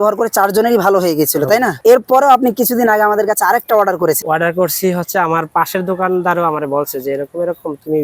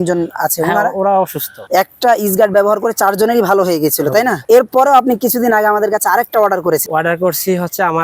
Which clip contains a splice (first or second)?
second